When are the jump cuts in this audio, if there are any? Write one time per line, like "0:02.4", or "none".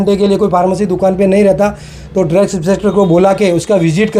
none